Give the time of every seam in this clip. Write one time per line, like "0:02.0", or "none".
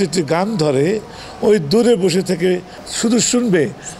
0:02.8